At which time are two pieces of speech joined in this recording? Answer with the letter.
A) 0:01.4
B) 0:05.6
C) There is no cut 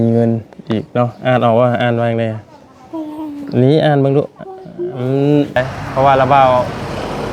B